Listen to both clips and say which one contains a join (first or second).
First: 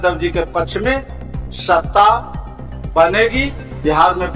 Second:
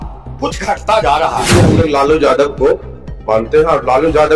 second